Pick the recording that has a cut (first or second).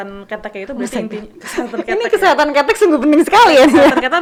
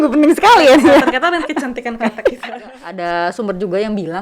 second